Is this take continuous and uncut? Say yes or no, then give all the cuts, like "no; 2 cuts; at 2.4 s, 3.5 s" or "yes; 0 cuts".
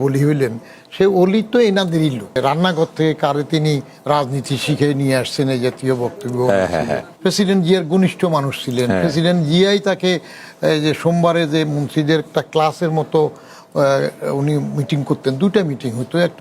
no; 2 cuts; at 2.4 s, 7.1 s